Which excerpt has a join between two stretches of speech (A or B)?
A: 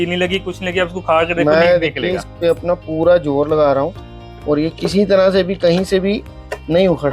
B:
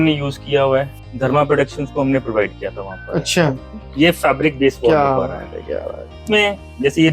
B